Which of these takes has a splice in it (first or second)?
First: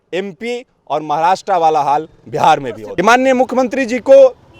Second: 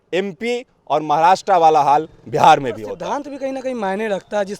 first